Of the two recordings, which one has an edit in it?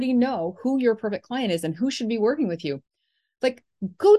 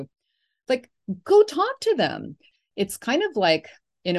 second; 1 cut; at 2.5 s

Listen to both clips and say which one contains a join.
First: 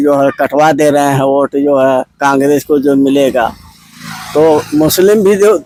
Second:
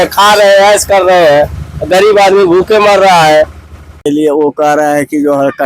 second; 1 cut; at 4.1 s

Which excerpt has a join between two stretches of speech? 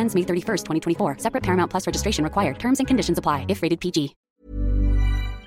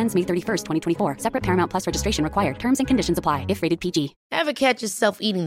first; 1 cut; at 4.2 s

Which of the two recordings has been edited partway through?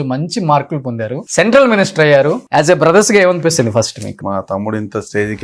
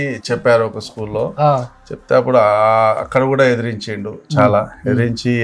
first; 3 cuts; at 1.2 s, 2.4 s, 4.2 s

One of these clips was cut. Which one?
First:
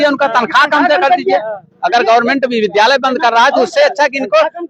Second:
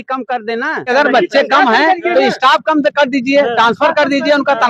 second; 1 cut; at 0.9 s

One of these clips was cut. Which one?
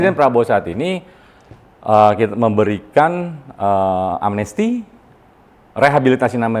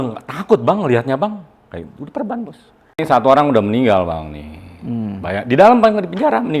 second; 1 cut; at 3.0 s

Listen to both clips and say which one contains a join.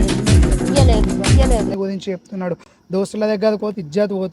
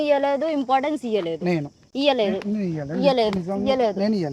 first; 1 cut; at 1.7 s

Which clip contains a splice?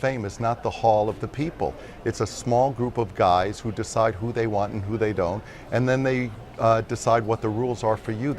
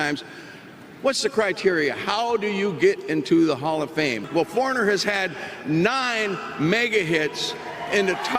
second; 1 cut; at 4.3 s

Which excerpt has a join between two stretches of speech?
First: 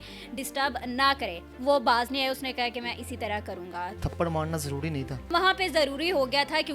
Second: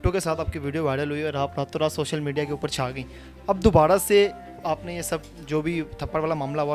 first; 3 cuts; at 1.5 s, 4.0 s, 5.3 s

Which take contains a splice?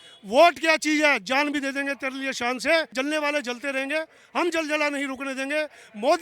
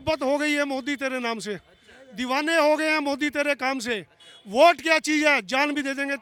first; 1 cut; at 2.9 s

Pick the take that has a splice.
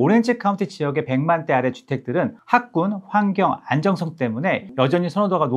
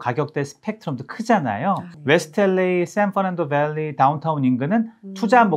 first; 2 cuts; at 2.4 s, 4.7 s

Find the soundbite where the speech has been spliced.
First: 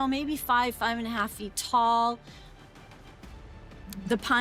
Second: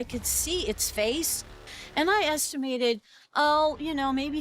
second; 1 cut; at 1.6 s

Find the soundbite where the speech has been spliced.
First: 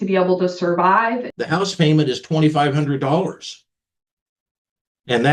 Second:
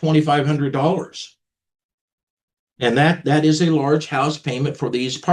first; 1 cut; at 1.3 s

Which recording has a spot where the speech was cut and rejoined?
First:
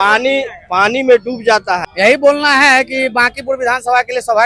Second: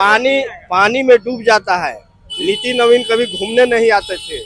first; 1 cut; at 1.9 s

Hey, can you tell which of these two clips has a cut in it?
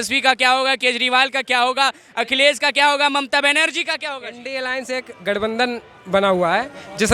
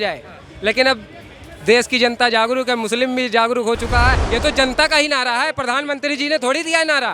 second; 1 cut; at 4.2 s

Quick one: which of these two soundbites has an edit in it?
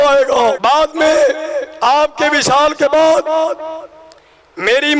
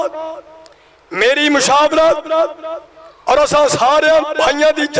second; 1 cut; at 3.6 s

